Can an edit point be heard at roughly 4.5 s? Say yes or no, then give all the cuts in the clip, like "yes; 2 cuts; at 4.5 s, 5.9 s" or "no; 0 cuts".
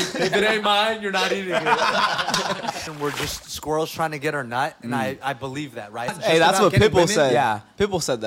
no; 2 cuts; at 2.8 s, 6.1 s